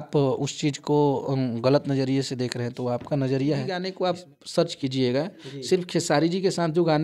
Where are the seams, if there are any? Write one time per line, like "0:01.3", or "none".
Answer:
0:03.9